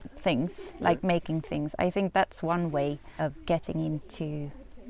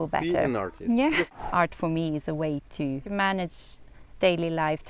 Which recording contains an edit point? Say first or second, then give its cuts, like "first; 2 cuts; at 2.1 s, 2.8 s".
second; 2 cuts; at 1.3 s, 3.0 s